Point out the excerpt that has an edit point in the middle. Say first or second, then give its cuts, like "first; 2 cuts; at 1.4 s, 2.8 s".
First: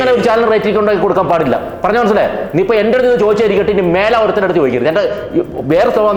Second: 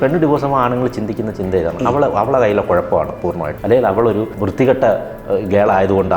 second; 2 cuts; at 3.5 s, 4.4 s